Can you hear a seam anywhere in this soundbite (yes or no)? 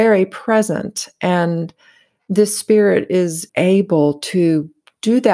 yes